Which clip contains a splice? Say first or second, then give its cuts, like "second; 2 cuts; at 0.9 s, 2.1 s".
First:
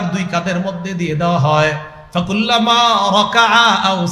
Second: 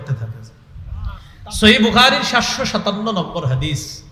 second; 1 cut; at 1.0 s